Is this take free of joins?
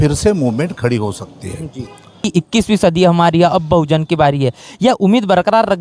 no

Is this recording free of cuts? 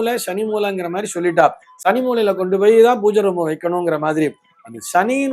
yes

